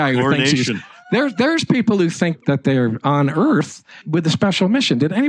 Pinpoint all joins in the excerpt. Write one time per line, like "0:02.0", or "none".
0:02.4
0:04.0